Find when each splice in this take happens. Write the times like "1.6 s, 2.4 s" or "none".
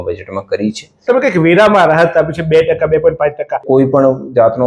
1.0 s, 3.6 s